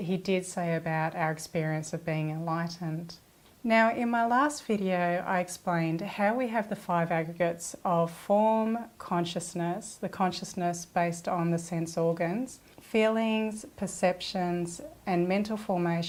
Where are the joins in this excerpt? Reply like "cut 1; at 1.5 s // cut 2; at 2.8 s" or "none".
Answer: none